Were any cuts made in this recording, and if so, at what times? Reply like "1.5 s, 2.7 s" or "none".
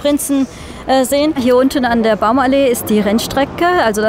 1.4 s